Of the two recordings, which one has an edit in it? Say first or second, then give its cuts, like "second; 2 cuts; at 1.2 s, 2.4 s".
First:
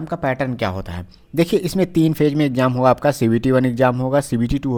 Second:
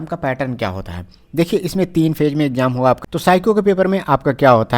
second; 1 cut; at 3.0 s